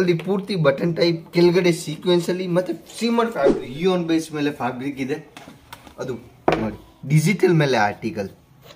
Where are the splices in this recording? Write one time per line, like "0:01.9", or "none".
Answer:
0:03.6